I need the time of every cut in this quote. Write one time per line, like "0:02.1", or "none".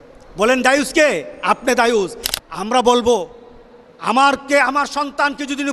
0:02.3